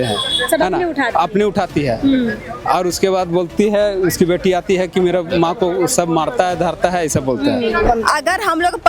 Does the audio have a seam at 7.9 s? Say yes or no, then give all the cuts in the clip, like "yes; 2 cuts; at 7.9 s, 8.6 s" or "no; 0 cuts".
yes; 1 cut; at 7.9 s